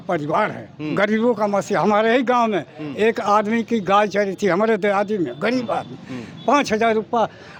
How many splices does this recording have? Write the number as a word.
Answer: zero